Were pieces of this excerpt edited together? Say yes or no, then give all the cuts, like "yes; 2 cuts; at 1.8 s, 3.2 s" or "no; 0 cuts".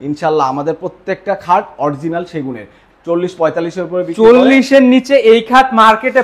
yes; 1 cut; at 2.8 s